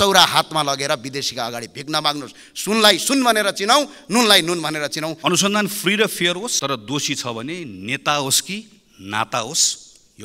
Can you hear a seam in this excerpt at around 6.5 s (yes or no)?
yes